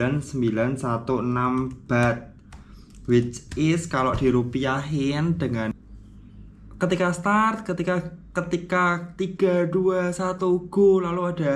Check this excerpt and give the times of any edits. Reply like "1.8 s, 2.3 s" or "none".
5.7 s